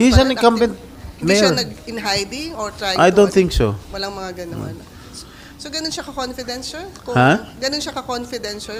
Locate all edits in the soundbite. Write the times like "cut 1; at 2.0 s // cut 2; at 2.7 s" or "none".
none